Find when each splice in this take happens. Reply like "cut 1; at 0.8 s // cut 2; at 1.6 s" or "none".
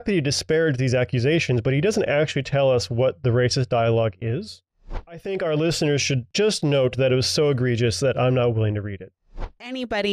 cut 1; at 4.6 s // cut 2; at 6.3 s // cut 3; at 9.3 s